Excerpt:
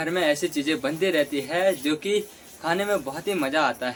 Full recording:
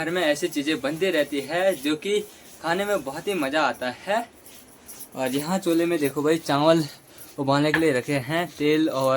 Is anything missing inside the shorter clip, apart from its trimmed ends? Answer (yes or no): no